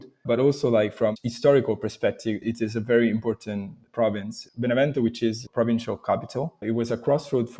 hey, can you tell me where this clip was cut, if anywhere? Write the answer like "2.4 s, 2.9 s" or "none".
1.1 s, 2.5 s, 5.4 s, 6.6 s